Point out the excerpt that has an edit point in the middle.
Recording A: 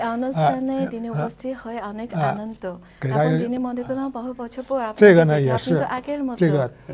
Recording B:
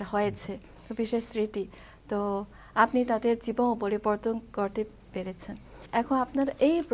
B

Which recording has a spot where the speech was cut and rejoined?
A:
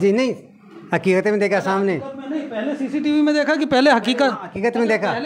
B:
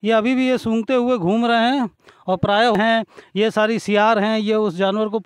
B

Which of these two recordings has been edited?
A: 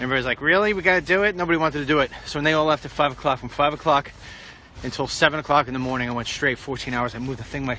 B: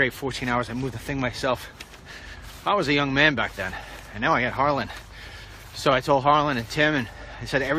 A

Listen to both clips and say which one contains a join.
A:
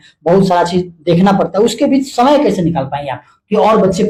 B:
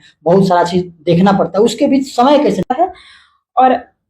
B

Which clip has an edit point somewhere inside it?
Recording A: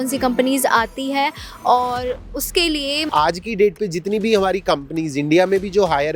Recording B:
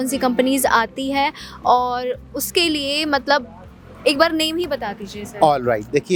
A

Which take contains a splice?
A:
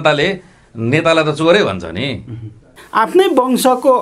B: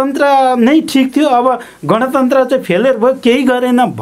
A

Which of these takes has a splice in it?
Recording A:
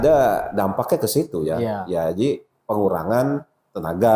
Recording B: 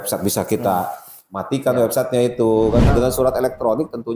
B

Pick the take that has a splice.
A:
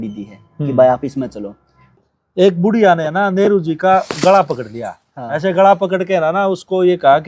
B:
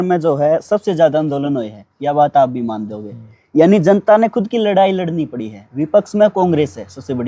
A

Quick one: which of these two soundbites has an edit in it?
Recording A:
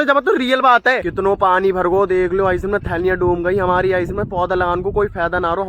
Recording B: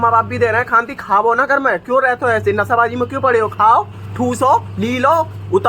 A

